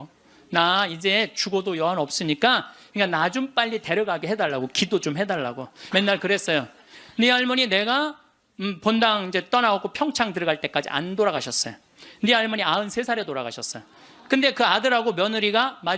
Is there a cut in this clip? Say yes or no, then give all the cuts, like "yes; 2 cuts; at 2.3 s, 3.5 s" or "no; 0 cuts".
yes; 2 cuts; at 2.8 s, 5.7 s